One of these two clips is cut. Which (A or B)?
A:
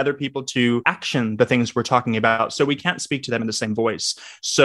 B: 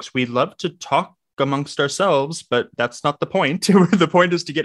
A